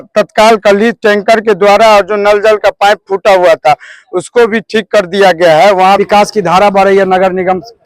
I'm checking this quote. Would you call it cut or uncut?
cut